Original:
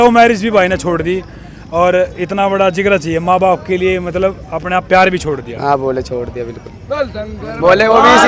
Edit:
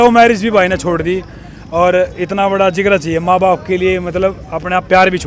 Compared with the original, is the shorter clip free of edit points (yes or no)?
yes